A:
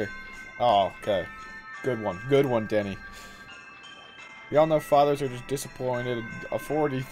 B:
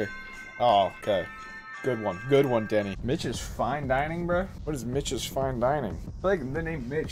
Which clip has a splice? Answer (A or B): B